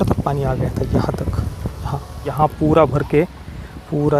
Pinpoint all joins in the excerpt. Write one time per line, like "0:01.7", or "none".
0:02.3